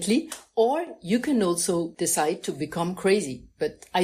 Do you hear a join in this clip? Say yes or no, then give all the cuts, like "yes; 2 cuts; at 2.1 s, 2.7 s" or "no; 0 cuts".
yes; 1 cut; at 1.9 s